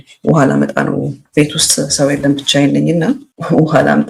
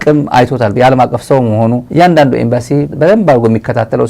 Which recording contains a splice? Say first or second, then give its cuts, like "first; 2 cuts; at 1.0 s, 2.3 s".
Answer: second; 1 cut; at 1.8 s